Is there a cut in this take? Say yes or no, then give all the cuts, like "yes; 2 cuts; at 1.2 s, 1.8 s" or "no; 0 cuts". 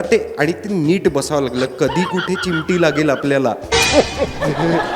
no; 0 cuts